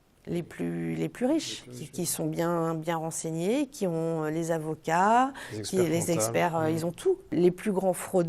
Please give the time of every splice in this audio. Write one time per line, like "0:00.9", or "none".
0:07.3